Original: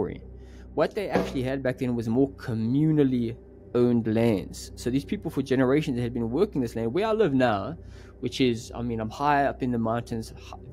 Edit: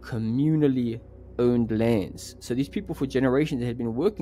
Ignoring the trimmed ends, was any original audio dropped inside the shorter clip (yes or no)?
no